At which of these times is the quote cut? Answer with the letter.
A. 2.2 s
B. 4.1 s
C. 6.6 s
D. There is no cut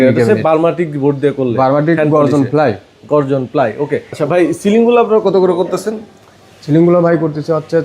B